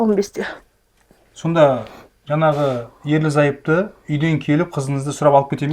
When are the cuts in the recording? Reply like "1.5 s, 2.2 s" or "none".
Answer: none

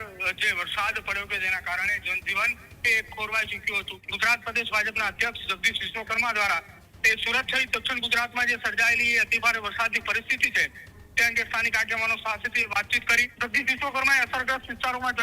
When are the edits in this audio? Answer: 3.9 s, 13.3 s

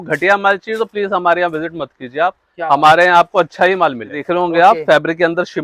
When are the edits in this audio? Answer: 4.1 s

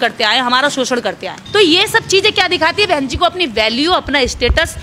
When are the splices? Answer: 1.3 s

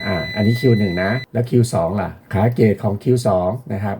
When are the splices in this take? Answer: 1.2 s, 2.2 s

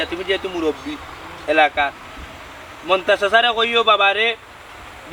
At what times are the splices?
none

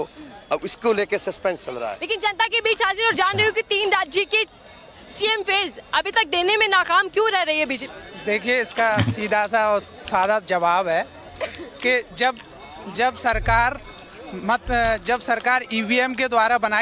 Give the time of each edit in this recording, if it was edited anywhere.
none

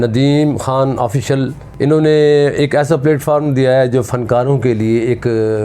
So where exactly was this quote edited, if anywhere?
1.6 s

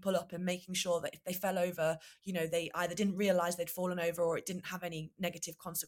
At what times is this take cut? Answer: none

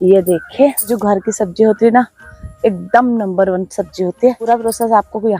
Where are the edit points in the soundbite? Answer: 0.9 s, 4.5 s

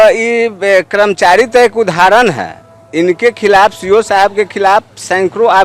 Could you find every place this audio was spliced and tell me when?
none

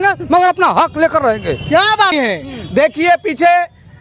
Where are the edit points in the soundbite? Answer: 2.1 s

